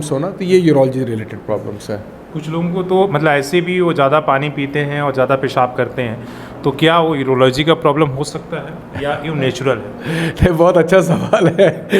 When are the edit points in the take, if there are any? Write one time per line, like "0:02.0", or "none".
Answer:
none